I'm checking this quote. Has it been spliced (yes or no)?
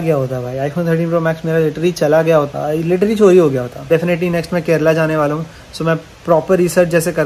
yes